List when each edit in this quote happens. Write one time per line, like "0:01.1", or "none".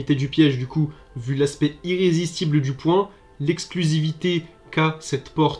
none